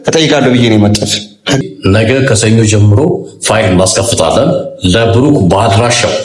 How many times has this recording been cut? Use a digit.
1